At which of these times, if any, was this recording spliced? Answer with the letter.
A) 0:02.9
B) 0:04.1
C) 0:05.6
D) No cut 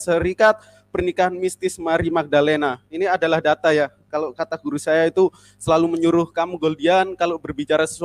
D